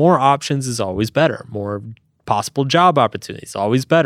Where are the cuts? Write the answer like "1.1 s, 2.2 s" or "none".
none